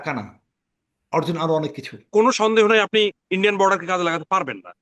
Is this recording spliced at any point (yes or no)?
yes